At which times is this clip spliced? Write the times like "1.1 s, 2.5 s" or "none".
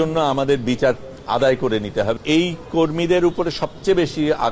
2.1 s